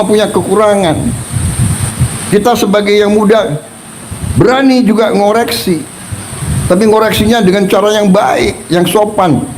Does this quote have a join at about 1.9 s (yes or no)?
yes